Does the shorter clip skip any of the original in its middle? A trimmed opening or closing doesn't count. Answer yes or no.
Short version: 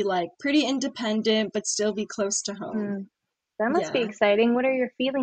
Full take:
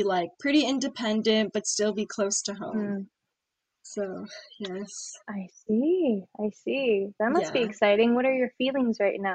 yes